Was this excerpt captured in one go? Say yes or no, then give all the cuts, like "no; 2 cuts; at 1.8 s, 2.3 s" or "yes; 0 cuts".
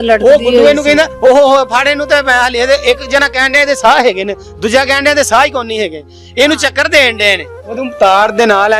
no; 1 cut; at 7.8 s